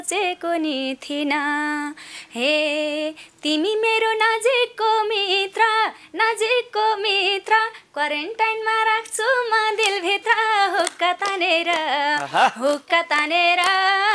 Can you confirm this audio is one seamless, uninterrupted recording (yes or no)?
yes